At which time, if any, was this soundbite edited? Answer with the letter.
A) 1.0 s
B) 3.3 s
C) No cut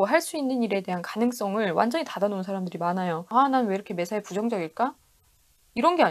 B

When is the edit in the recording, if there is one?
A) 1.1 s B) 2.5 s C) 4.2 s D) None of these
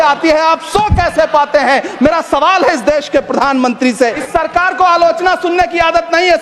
C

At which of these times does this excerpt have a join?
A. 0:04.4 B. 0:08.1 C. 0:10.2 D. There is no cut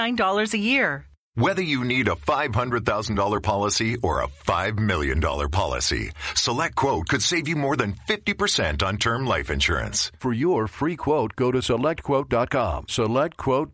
D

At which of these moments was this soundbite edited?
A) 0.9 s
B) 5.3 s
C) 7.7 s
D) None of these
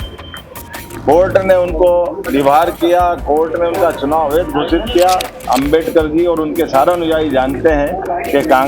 B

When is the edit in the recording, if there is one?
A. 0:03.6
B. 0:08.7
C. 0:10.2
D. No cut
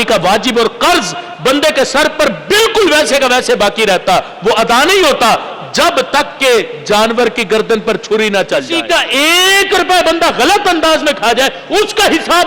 B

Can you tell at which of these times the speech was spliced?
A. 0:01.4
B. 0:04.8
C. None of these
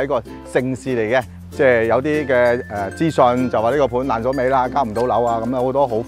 A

